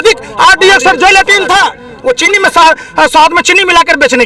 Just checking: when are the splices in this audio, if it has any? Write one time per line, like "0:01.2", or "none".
0:01.8